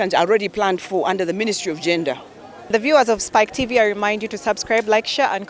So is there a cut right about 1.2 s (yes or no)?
no